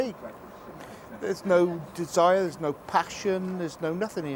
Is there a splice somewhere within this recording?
no; 0 cuts

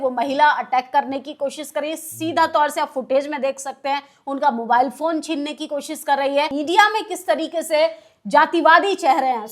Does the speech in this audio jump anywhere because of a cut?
yes; 1 cut; at 6.5 s

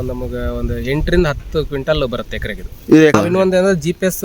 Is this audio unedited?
no; 1 cut; at 3.1 s

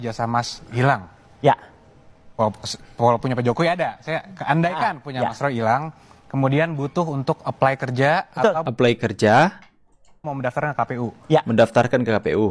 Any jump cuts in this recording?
no; 0 cuts

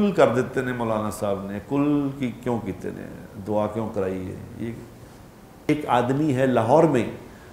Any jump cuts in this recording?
yes; 1 cut; at 5.7 s

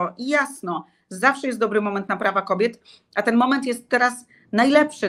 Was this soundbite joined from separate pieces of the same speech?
no; 0 cuts

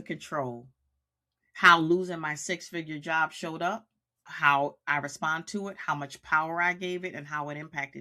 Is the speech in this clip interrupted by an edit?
no; 0 cuts

